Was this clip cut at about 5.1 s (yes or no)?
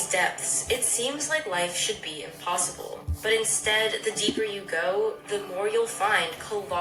no